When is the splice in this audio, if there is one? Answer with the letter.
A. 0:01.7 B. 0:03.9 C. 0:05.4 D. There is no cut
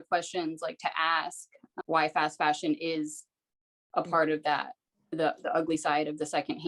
A